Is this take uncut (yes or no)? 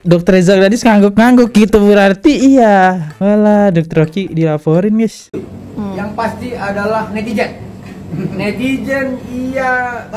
yes